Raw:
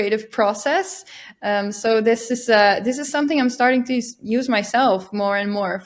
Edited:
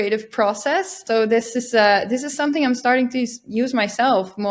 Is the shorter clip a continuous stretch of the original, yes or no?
no